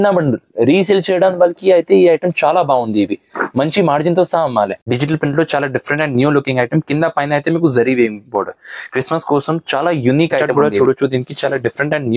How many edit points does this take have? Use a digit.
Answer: 2